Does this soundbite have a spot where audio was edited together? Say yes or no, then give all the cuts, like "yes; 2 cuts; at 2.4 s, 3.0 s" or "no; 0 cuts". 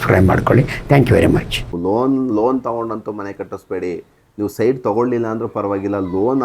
yes; 1 cut; at 1.6 s